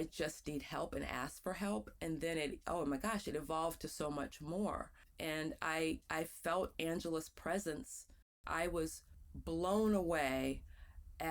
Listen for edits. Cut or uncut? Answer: cut